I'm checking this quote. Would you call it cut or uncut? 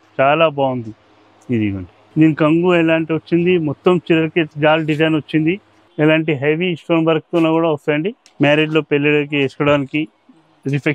cut